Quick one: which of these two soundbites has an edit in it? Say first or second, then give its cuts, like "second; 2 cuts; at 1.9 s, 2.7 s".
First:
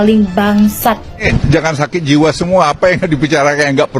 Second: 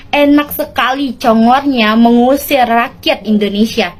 first; 1 cut; at 1.2 s